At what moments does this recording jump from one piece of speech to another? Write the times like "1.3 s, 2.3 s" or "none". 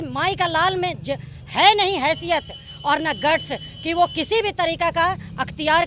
none